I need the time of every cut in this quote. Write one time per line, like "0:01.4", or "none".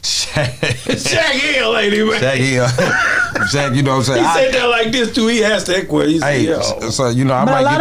none